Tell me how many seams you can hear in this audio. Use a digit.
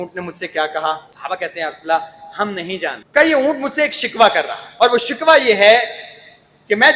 3